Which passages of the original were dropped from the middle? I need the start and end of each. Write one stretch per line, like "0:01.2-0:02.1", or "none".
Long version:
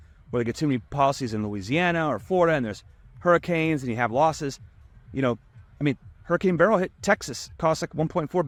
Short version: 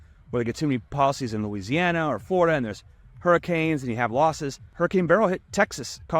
0:04.6-0:06.1